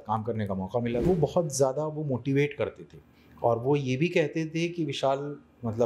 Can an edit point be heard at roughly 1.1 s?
yes; 1 cut; at 1.1 s

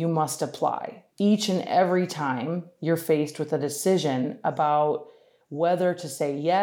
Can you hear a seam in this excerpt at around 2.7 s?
no; 1 cut; at 1.0 s

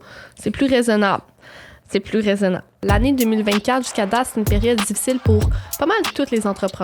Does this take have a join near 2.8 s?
yes; 1 cut; at 2.8 s

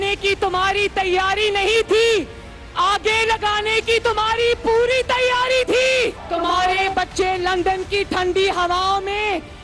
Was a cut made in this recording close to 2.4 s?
no; 0 cuts

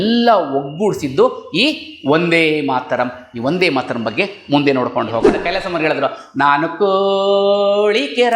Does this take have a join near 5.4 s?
yes; 1 cut; at 5.4 s

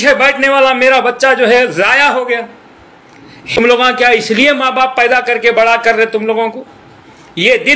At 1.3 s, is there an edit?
no; 1 cut; at 3.6 s

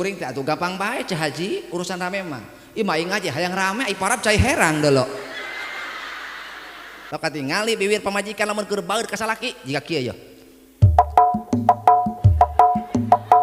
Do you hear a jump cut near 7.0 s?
yes; 1 cut; at 7.0 s

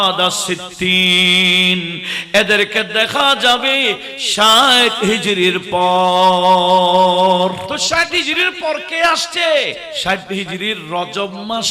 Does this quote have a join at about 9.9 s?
yes; 2 cuts; at 7.7 s, 9.9 s

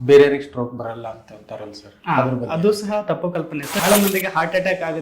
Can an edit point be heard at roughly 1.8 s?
no; 1 cut; at 3.8 s

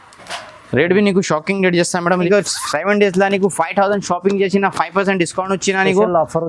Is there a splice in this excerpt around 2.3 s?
yes; 1 cut; at 2.3 s

